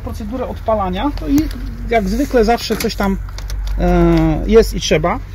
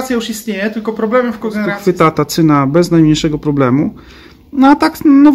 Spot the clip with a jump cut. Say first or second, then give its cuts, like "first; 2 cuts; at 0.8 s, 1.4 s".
second; 1 cut; at 1.8 s